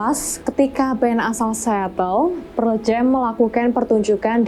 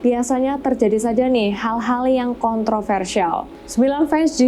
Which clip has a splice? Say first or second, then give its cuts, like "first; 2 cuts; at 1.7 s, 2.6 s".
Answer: second; 1 cut; at 3.6 s